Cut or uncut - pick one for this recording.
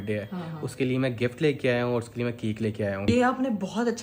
cut